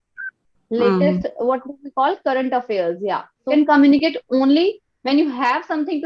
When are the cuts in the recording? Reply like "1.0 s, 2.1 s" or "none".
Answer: 3.5 s